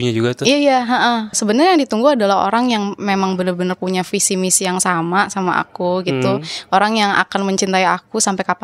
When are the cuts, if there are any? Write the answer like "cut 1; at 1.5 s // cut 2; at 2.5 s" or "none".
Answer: cut 1; at 1.4 s